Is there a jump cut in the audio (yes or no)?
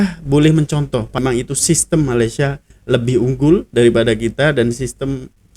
yes